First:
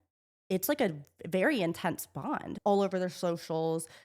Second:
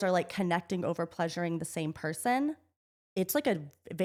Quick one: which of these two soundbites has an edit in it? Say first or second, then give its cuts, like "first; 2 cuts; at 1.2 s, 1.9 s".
first; 1 cut; at 2.5 s